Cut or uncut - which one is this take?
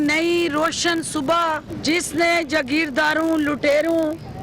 cut